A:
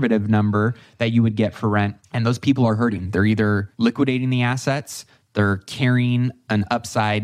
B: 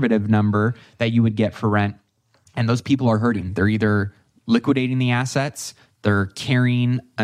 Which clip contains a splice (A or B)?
A